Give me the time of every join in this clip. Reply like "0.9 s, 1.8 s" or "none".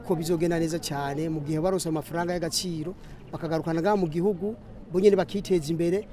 none